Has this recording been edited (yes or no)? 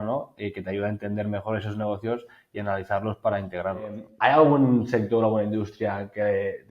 yes